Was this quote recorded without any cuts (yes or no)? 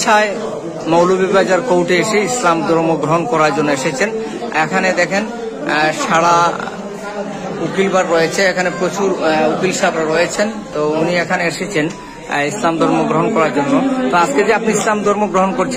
yes